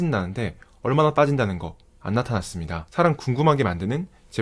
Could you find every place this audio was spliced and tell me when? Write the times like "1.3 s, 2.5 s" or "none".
2.8 s